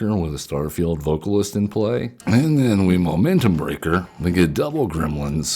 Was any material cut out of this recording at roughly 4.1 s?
yes; 2 cuts; at 2.1 s, 4.1 s

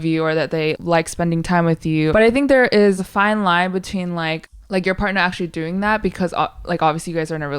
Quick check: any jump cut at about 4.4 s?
yes; 4 cuts; at 0.8 s, 2.1 s, 3.0 s, 4.4 s

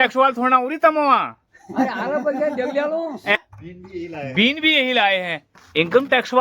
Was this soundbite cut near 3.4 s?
yes; 1 cut; at 3.4 s

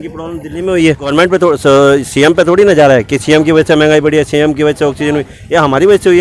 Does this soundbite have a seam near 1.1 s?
yes; 1 cut; at 1.1 s

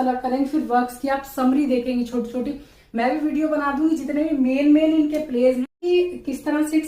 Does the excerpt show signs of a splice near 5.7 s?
yes; 1 cut; at 5.7 s

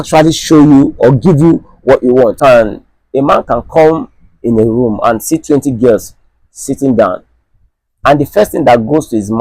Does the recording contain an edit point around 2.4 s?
yes; 1 cut; at 2.4 s

